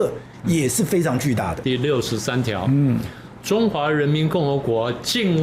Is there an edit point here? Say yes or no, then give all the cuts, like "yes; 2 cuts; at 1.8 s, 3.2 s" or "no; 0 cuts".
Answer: yes; 1 cut; at 1.6 s